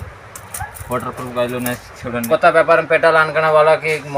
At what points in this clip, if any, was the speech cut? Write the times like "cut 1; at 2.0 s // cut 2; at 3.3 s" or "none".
cut 1; at 2.2 s